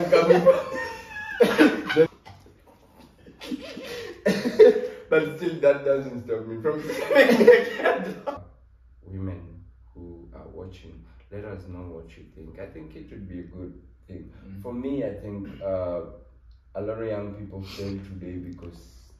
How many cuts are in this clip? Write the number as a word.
two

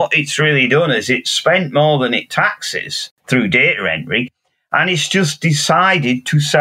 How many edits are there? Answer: one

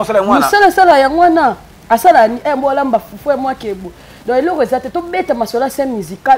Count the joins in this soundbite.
zero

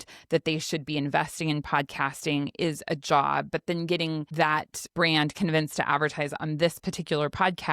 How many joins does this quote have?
one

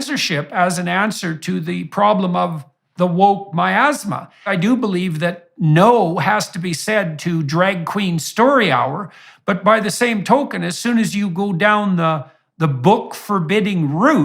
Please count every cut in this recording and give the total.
one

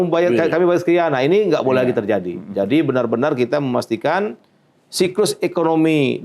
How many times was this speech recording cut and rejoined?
zero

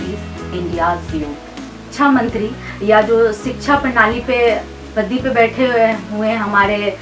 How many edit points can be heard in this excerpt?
one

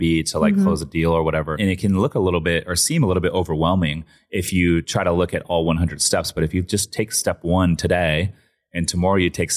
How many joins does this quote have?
one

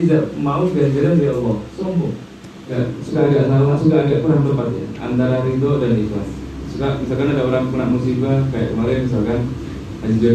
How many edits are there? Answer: one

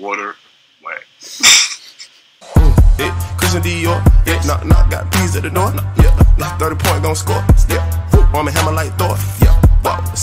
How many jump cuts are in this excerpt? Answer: one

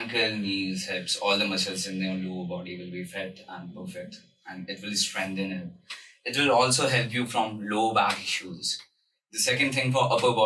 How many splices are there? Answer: zero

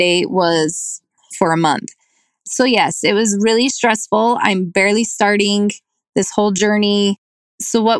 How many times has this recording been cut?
one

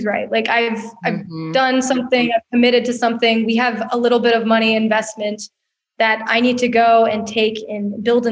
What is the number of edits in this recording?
zero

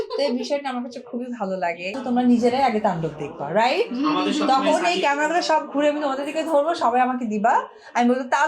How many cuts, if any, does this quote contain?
one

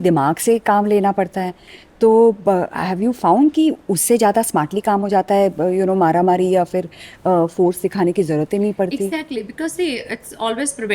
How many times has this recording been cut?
zero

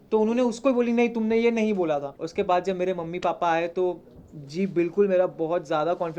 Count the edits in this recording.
one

